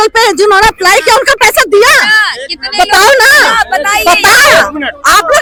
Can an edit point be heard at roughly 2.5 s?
no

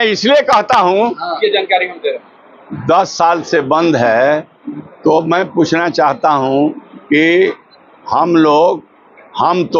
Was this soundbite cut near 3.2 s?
no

